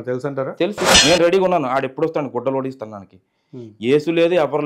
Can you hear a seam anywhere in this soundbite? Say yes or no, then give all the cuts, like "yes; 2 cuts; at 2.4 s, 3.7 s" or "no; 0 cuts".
yes; 1 cut; at 0.9 s